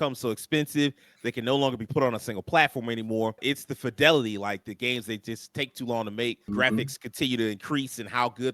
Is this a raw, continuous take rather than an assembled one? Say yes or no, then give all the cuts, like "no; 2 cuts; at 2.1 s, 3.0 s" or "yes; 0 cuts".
no; 2 cuts; at 3.4 s, 6.5 s